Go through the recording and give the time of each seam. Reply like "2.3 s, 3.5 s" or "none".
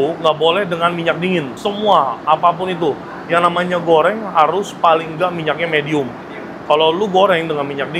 none